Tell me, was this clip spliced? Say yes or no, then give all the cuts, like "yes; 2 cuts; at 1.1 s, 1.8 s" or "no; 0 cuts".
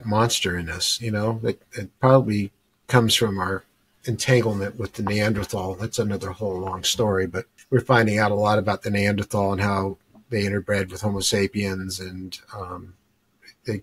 yes; 1 cut; at 7.5 s